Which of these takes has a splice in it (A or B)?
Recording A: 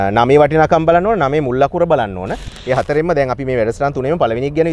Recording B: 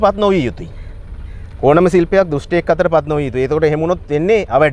A